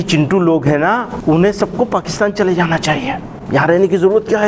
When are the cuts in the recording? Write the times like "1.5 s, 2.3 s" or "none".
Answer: 1.1 s, 3.3 s